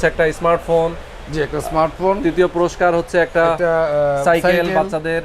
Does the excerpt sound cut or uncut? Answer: uncut